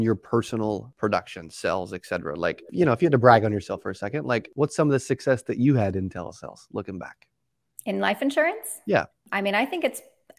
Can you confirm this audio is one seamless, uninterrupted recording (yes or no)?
no